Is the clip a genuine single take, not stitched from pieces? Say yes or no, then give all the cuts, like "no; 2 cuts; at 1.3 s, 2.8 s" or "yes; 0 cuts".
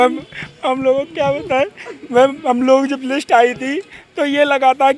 yes; 0 cuts